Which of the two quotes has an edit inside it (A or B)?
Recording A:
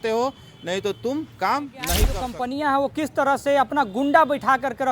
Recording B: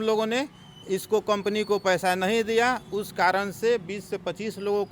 A